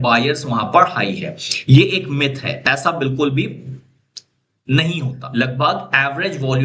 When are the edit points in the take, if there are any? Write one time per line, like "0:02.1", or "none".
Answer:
0:05.2